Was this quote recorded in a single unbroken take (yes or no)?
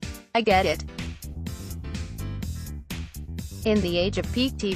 yes